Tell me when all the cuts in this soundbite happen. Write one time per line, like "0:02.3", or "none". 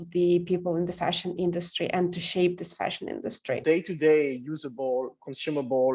0:03.6